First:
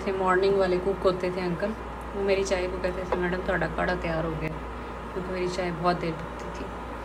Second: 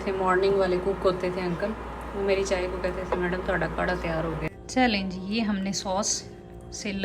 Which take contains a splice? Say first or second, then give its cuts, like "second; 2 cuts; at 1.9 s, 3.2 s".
second; 1 cut; at 4.6 s